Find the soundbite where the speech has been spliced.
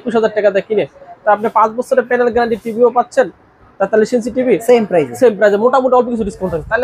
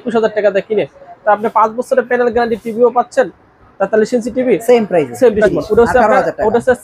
second; 1 cut; at 5.4 s

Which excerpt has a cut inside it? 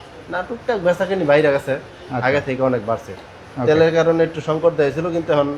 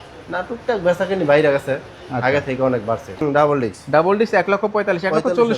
second; 1 cut; at 3.1 s

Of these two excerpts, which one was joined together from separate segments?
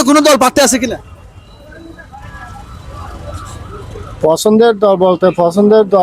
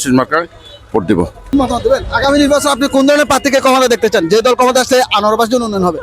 second; 1 cut; at 1.4 s

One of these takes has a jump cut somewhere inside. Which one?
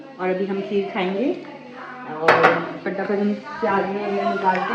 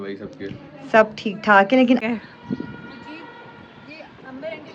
second; 1 cut; at 2.0 s

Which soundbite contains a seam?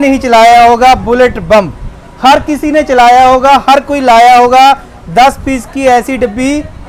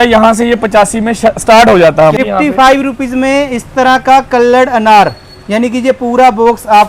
second; 1 cut; at 2.1 s

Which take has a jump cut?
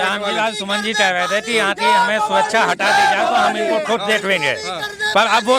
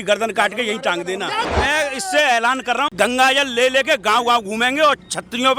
second; 2 cuts; at 1.4 s, 2.9 s

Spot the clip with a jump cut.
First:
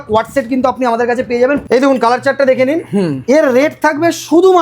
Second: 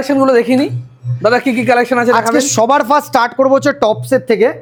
first; 1 cut; at 1.6 s

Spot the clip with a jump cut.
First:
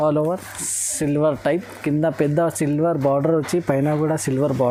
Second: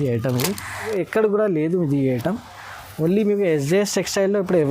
second; 1 cut; at 0.9 s

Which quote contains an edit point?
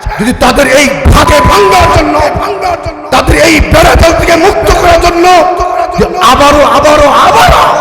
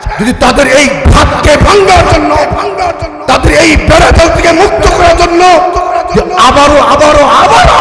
first; 1 cut; at 1.3 s

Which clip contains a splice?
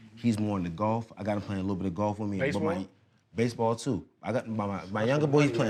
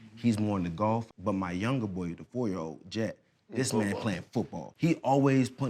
second; 2 cuts; at 1.1 s, 4.6 s

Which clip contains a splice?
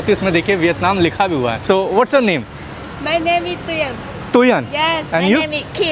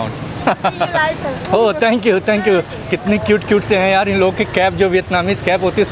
first; 1 cut; at 1.6 s

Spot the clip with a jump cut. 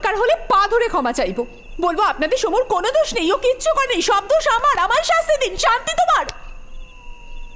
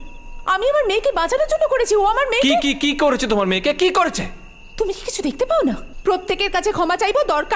second; 1 cut; at 5.9 s

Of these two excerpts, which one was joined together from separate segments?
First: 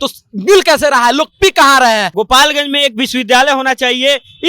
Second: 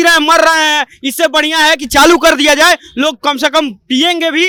first; 1 cut; at 2.1 s

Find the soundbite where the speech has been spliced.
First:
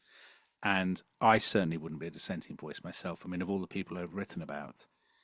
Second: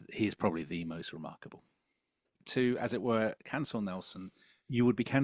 second; 1 cut; at 2.4 s

